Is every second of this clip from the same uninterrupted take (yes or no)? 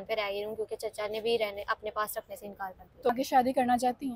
no